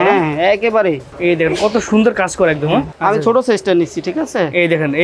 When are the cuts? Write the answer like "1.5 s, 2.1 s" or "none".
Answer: 1.1 s, 2.9 s